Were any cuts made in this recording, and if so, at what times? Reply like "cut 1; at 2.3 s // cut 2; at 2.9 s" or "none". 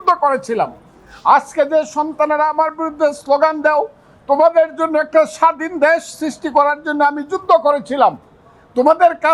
none